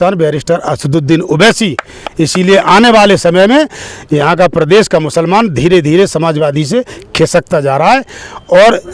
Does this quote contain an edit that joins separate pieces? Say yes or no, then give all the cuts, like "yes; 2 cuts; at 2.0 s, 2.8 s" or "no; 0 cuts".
no; 0 cuts